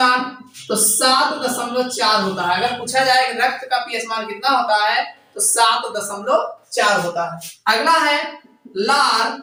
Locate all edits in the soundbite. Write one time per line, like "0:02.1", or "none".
none